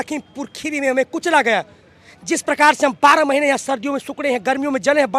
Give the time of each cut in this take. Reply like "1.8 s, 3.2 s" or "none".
none